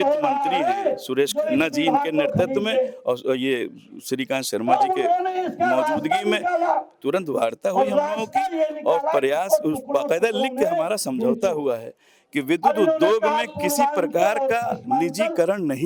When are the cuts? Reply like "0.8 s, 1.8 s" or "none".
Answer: none